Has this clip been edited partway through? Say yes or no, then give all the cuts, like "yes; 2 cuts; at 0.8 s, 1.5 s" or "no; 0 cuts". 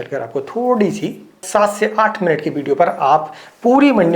yes; 1 cut; at 1.4 s